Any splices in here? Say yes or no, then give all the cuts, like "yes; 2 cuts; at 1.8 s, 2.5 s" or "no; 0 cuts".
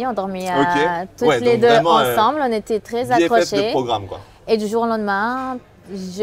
no; 0 cuts